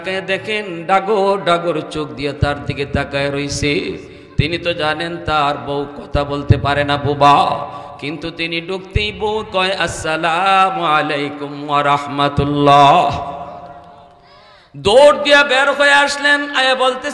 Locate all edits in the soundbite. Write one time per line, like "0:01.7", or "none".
none